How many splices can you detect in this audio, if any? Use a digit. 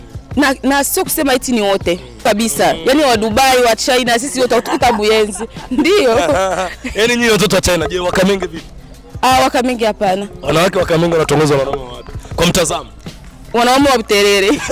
1